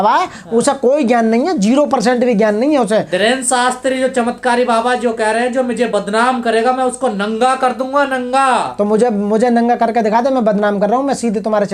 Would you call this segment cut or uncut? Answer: uncut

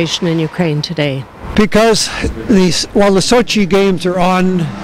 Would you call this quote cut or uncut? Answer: cut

